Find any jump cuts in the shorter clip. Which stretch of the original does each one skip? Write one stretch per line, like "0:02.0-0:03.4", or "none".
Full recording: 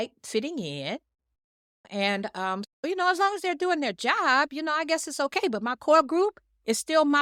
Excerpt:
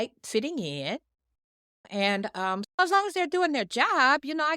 0:02.8-0:03.1